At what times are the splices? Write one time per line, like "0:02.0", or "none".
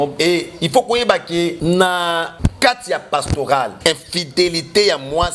0:01.6
0:02.3
0:03.7